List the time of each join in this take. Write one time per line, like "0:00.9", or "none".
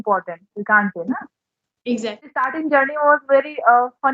0:02.5